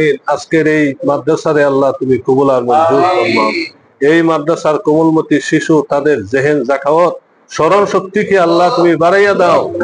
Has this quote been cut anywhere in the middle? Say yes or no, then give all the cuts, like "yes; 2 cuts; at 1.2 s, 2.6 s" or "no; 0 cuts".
no; 0 cuts